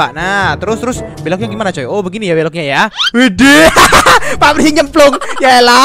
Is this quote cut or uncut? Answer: uncut